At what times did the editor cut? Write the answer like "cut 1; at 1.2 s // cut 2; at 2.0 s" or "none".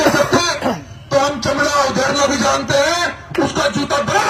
none